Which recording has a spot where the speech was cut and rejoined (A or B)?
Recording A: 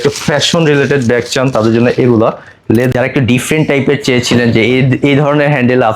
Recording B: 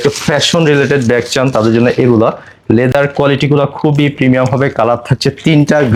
A